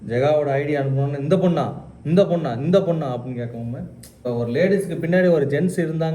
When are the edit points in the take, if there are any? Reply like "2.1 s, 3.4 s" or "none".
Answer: 4.2 s